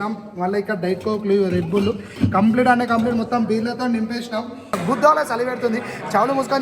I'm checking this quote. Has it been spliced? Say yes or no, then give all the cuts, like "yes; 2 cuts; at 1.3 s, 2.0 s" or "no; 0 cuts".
yes; 1 cut; at 4.8 s